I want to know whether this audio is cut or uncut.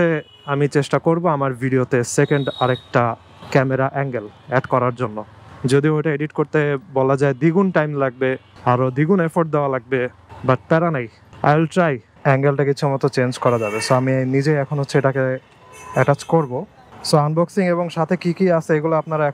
cut